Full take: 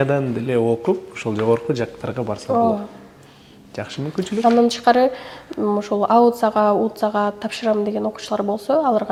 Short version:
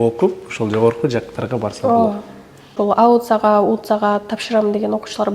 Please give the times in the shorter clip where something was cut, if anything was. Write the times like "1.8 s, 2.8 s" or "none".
2.7 s